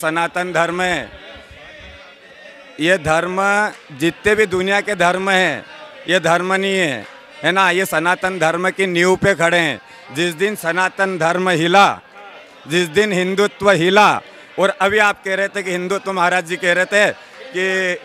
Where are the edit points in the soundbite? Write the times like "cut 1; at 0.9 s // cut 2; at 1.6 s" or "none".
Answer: none